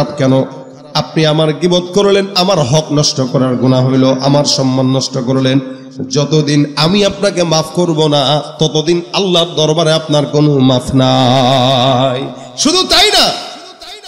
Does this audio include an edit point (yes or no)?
no